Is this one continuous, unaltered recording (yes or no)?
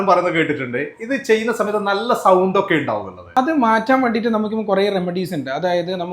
no